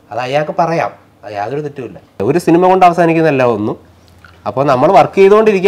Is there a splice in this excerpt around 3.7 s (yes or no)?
no